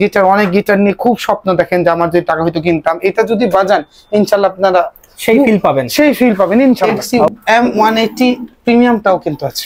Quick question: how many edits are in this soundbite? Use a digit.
1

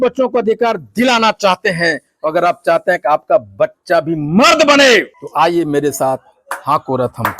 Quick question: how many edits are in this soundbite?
1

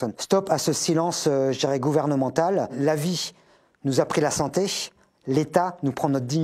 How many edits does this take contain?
0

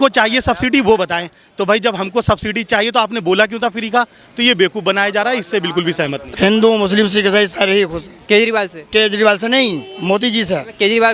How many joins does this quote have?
1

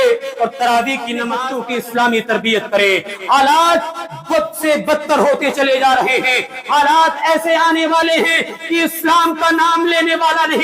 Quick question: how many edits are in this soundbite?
1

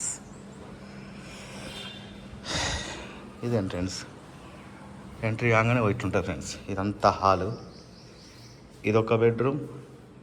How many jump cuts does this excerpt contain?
0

